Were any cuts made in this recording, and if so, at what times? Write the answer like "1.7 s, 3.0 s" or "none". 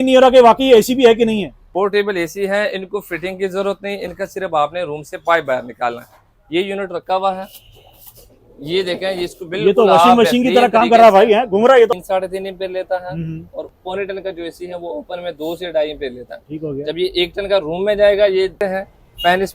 1.6 s, 11.9 s, 18.6 s